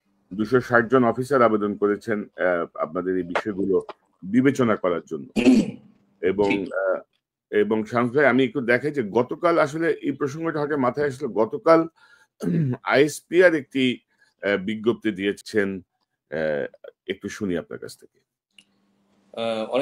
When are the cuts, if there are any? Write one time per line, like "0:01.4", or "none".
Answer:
0:15.4